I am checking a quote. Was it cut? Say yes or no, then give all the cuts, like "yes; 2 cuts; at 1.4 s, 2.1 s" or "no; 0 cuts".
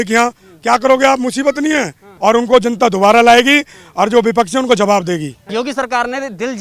yes; 2 cuts; at 2.0 s, 5.4 s